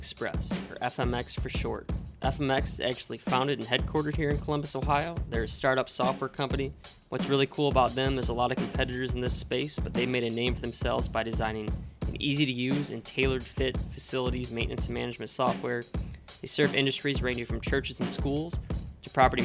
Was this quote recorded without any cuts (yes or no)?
yes